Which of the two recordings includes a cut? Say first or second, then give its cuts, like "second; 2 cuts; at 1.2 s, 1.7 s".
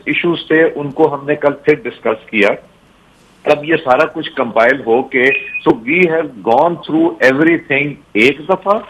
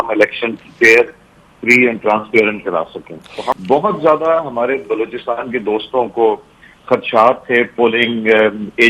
second; 1 cut; at 3.6 s